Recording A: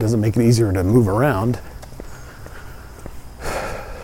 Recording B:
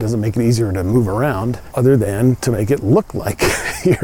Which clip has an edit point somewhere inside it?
B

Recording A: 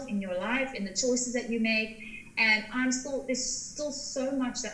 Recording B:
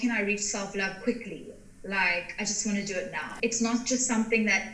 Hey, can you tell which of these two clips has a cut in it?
B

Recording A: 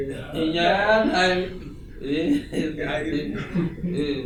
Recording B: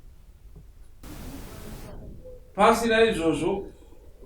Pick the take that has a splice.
B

